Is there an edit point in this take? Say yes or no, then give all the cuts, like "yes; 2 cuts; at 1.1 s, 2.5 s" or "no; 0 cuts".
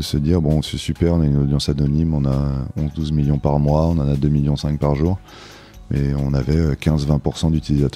no; 0 cuts